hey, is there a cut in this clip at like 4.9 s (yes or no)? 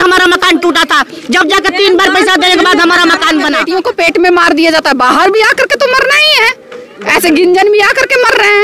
no